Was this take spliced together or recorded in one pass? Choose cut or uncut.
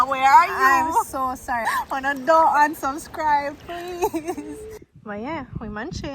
cut